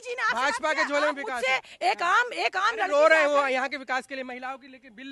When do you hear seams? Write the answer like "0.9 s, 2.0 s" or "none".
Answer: none